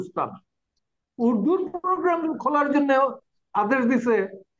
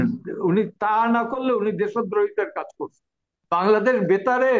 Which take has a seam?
second; 1 cut; at 3.4 s

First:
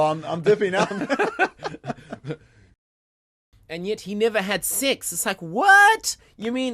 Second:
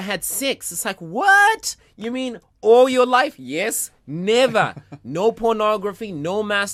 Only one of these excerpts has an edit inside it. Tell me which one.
first; 1 cut; at 3.0 s

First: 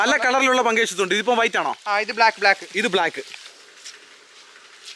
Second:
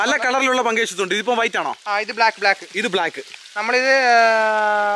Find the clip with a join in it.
first; 1 cut; at 3.5 s

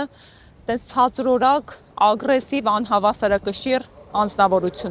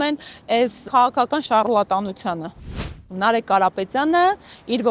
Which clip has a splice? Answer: second; 1 cut; at 2.8 s

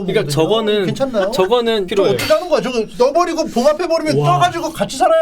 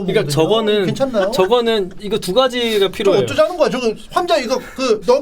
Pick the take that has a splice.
first; 2 cuts; at 1.9 s, 2.9 s

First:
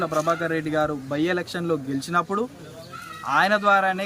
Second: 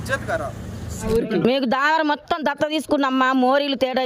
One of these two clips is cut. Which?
second; 1 cut; at 1.1 s

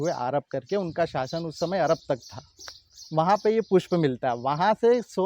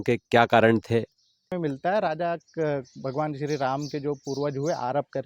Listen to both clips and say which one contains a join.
second; 1 cut; at 1.5 s

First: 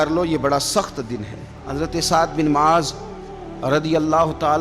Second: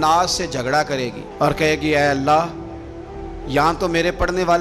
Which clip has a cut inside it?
first; 1 cut; at 1.6 s

